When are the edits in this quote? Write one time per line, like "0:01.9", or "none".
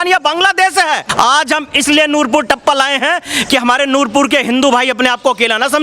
0:01.1